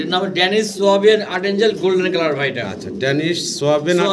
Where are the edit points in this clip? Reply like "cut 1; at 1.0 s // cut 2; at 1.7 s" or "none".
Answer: none